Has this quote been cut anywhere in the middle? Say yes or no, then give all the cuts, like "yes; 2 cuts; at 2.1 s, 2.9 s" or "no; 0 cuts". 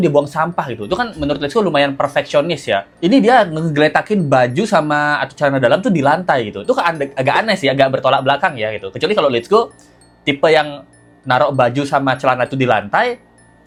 no; 0 cuts